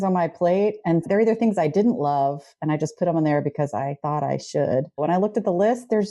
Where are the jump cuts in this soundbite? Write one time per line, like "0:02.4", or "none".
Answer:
0:01.0
0:04.0
0:05.0